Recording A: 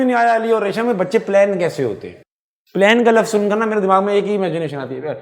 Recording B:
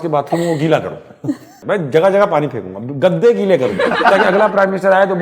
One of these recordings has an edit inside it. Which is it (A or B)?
B